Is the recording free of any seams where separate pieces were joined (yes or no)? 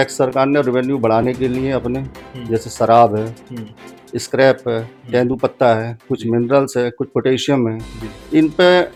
yes